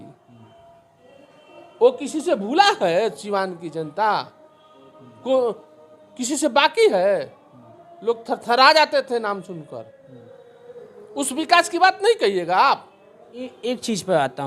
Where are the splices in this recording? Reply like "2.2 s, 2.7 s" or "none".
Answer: 13.5 s